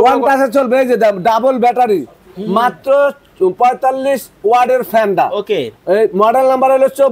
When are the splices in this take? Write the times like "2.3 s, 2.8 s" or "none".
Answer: none